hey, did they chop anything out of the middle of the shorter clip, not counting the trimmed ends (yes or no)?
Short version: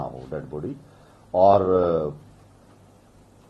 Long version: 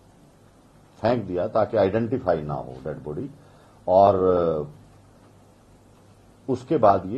no